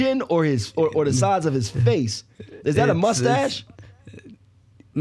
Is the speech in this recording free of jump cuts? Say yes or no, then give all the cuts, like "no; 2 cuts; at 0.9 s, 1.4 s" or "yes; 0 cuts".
yes; 0 cuts